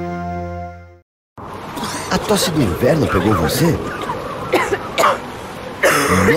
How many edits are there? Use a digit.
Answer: 1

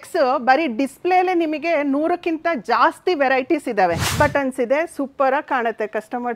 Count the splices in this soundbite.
1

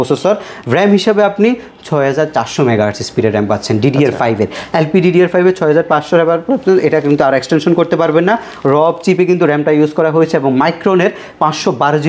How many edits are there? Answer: 0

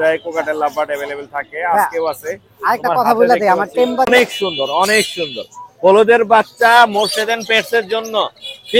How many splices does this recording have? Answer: 1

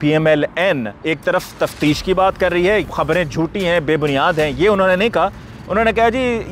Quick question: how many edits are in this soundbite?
2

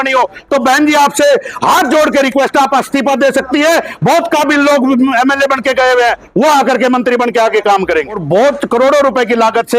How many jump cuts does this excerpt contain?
1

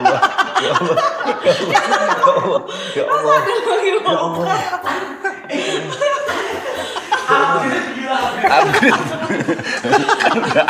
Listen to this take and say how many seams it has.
0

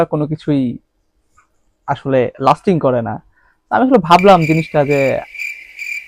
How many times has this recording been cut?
0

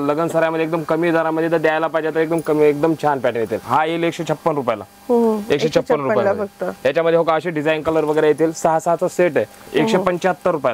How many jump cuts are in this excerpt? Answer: 2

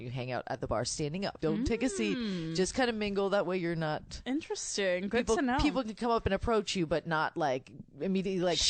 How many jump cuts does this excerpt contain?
2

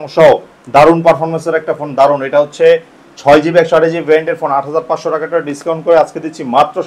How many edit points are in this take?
0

